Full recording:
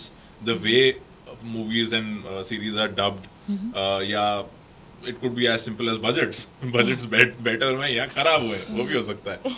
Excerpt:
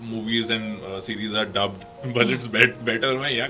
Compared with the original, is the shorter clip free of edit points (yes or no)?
no